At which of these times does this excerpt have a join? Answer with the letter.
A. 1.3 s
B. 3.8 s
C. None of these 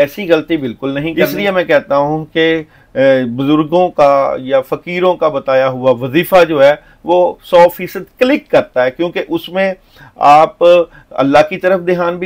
A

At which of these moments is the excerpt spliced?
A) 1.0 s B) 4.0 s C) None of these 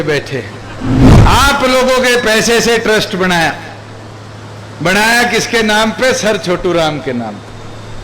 A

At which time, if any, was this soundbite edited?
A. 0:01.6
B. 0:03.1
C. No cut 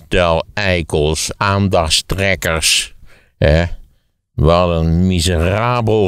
C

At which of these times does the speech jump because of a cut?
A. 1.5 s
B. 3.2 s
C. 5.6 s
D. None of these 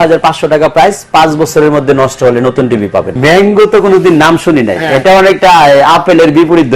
B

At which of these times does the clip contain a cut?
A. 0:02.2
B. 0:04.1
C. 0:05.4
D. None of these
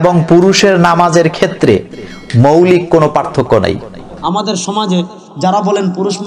B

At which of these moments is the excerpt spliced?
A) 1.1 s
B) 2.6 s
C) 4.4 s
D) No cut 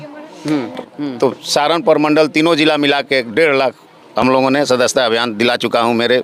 A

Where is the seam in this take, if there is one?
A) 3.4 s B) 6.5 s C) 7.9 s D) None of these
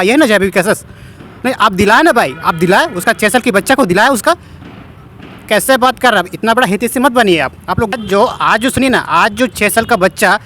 C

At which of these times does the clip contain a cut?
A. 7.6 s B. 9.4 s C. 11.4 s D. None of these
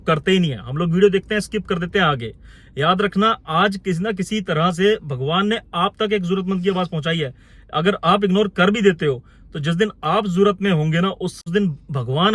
C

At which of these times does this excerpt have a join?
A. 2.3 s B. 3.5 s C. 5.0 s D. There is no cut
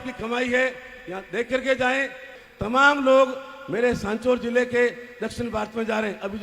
A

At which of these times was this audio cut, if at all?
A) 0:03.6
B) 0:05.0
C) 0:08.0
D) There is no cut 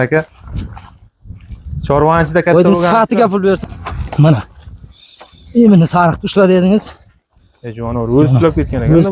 A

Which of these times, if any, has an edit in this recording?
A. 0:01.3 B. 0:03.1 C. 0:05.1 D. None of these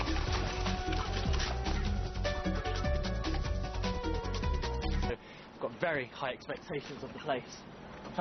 D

